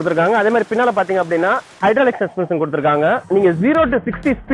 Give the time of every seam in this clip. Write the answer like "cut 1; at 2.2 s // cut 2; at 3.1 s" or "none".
cut 1; at 3.2 s